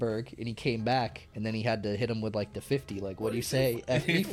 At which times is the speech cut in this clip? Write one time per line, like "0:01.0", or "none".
0:01.2